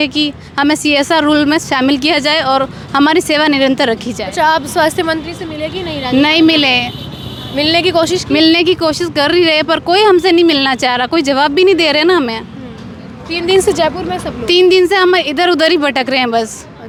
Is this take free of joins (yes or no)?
yes